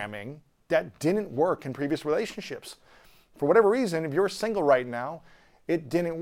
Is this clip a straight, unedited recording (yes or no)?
yes